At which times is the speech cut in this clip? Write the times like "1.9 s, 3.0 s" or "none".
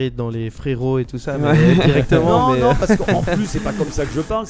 none

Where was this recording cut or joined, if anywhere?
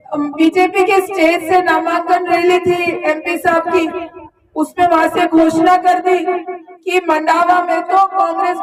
none

